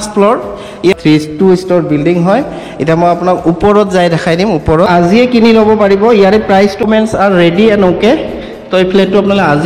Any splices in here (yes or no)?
yes